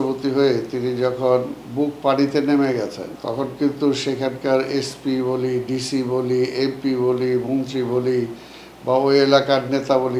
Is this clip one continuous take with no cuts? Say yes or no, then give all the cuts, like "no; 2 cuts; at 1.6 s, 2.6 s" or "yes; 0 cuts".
no; 1 cut; at 3.1 s